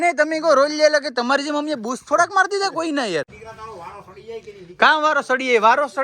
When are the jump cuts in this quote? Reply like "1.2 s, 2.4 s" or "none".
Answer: 3.4 s

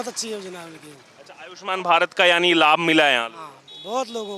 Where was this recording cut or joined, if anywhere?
none

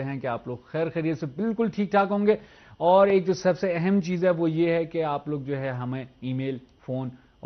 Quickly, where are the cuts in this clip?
5.1 s

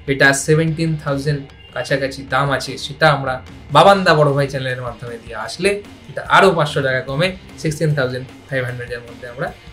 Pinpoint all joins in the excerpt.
none

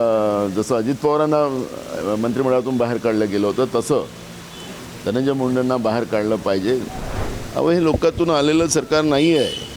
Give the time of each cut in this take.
7.0 s

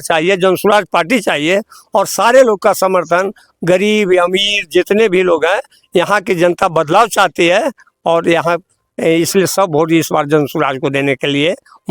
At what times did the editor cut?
none

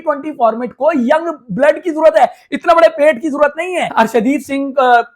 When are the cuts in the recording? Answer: 3.9 s

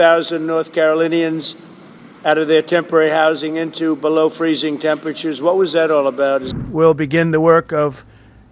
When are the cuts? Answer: 6.5 s

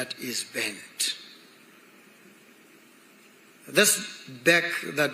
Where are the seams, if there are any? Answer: none

